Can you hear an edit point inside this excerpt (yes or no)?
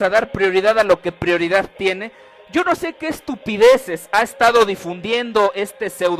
yes